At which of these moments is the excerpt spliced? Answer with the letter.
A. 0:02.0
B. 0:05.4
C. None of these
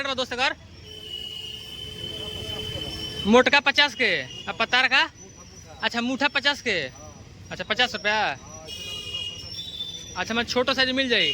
C